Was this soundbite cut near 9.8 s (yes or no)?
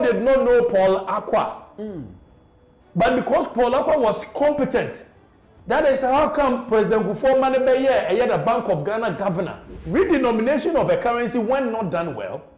yes